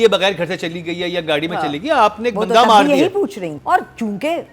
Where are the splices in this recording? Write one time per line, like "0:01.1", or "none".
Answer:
0:03.5